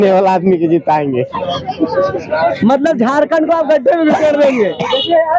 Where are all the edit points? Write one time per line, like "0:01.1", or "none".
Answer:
none